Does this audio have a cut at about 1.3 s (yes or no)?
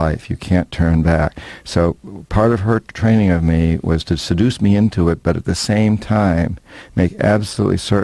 no